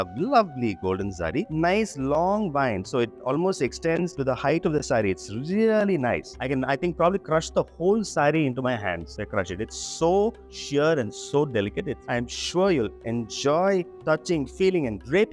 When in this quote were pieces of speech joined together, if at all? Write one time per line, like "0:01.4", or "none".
0:01.5
0:06.3
0:12.0